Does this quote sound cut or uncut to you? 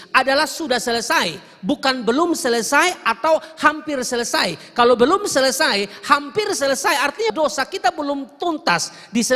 cut